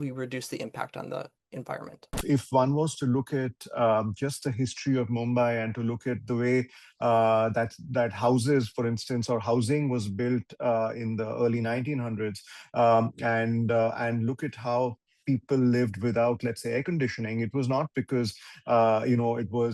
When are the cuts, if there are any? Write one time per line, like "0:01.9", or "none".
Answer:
0:02.2